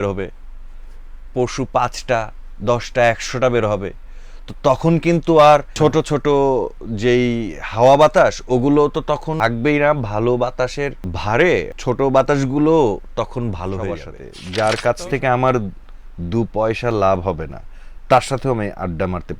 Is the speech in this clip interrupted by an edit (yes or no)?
yes